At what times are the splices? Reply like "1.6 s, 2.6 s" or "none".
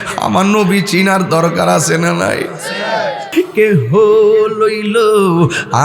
3.3 s